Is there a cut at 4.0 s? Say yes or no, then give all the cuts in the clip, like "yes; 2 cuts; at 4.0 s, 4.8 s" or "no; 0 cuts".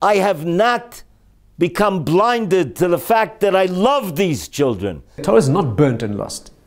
no; 1 cut; at 5.2 s